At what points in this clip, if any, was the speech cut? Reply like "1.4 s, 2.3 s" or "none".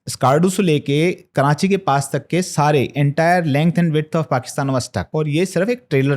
5.0 s

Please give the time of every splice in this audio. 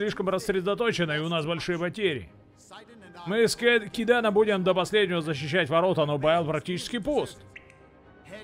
none

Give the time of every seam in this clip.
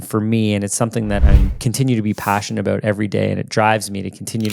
1.2 s

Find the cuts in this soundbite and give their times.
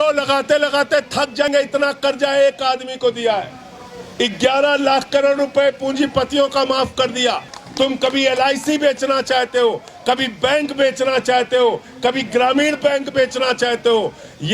1.4 s, 7.6 s

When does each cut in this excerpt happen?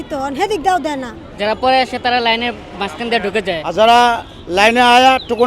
1.2 s, 3.7 s

